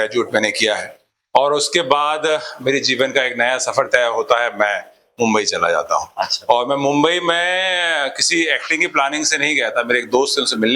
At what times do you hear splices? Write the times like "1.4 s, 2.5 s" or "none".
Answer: none